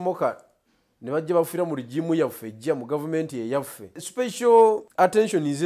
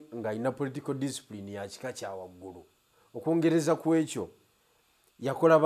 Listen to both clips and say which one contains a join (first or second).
first